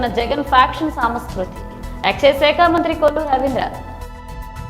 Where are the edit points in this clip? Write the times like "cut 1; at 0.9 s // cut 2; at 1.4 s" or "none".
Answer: cut 1; at 3.8 s